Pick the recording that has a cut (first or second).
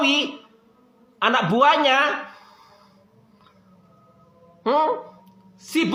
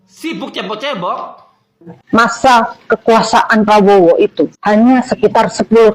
second